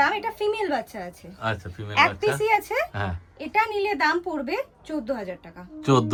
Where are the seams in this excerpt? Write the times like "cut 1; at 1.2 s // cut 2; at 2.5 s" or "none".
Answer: none